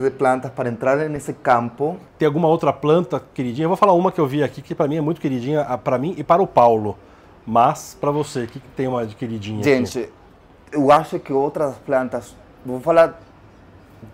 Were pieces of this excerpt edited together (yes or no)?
yes